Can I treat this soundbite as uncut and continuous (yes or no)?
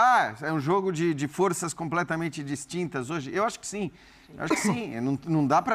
yes